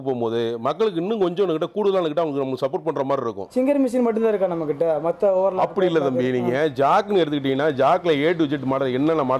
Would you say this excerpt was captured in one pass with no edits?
no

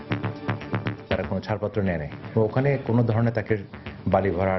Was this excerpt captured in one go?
no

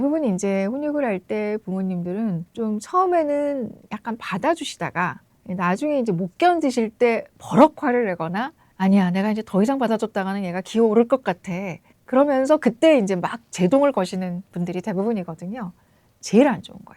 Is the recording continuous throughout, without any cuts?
no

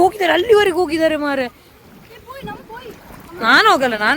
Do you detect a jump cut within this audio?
no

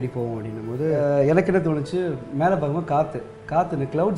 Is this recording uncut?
no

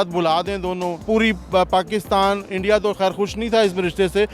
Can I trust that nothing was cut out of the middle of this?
no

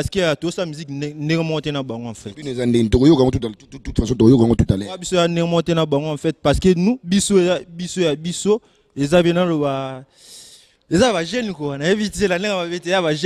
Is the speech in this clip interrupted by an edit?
no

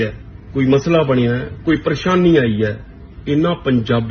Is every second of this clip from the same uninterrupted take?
yes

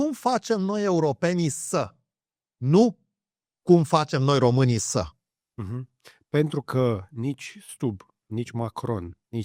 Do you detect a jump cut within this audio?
no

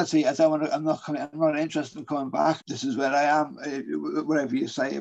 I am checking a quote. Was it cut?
yes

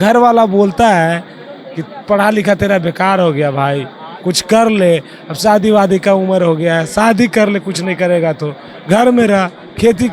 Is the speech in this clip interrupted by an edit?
no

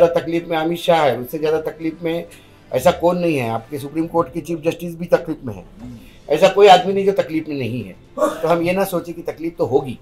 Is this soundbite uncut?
yes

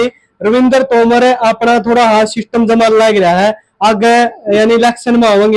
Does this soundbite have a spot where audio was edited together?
no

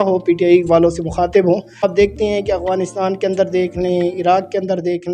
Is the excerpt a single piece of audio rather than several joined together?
no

